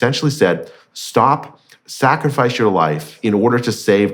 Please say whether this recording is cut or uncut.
cut